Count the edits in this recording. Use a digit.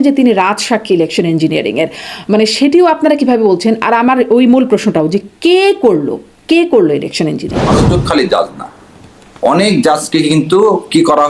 1